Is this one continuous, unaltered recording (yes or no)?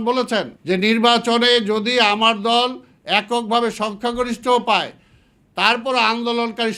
yes